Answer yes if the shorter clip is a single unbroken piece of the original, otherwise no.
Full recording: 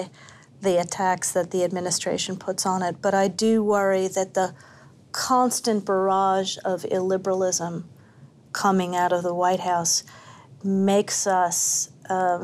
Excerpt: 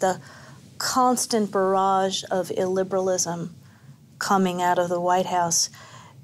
yes